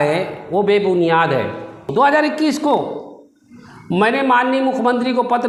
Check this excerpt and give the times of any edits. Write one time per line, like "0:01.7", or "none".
0:01.9